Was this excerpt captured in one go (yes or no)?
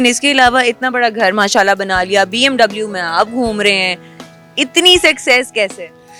yes